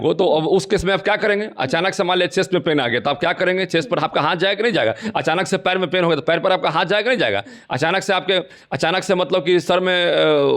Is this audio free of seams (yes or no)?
yes